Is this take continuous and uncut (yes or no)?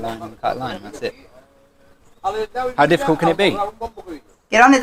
yes